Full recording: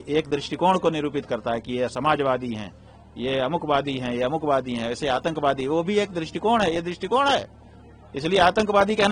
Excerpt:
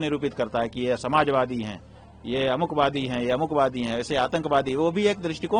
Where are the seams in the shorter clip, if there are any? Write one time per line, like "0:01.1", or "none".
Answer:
none